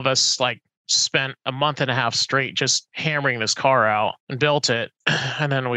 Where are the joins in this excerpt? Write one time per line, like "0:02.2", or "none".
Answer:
0:02.9
0:04.2
0:05.0